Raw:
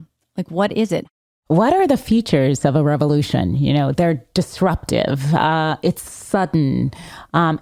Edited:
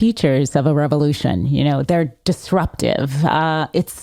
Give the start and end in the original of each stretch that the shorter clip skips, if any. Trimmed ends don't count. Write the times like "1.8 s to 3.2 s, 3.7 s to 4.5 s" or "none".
none